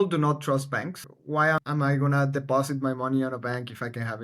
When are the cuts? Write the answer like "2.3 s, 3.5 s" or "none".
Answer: 1.6 s